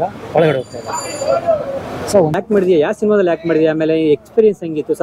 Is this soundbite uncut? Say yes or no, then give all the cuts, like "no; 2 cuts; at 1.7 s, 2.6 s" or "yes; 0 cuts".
no; 1 cut; at 2.4 s